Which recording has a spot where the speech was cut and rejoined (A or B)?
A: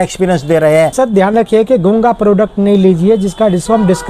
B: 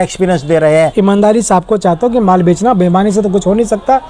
A